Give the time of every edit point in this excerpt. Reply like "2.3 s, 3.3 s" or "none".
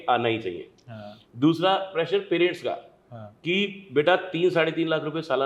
none

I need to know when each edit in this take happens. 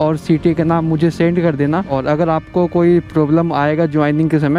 1.9 s

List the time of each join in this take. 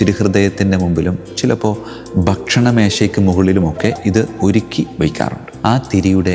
5.5 s

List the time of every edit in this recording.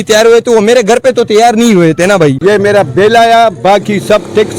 2.4 s

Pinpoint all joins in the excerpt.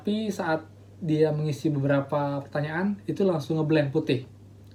none

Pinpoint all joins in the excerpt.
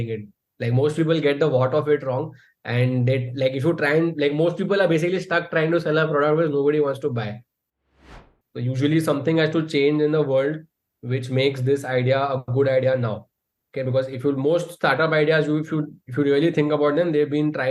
7.9 s

